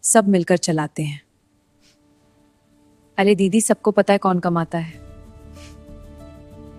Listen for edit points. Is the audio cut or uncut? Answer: uncut